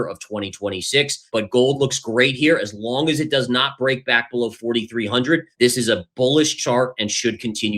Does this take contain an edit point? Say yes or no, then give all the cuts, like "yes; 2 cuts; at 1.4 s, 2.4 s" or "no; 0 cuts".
yes; 2 cuts; at 1.2 s, 5.5 s